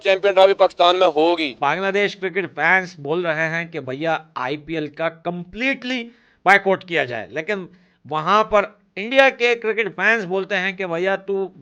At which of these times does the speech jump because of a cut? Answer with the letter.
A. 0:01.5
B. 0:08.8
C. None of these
A